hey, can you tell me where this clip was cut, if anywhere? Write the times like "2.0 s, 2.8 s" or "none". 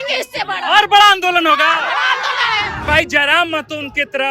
2.8 s